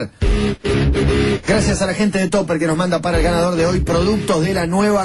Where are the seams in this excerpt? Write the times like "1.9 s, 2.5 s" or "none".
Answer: none